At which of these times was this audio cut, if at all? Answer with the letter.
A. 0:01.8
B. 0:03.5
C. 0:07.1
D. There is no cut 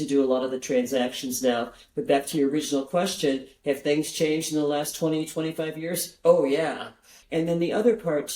C